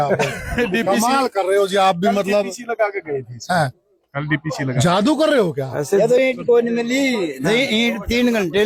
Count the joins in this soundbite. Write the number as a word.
zero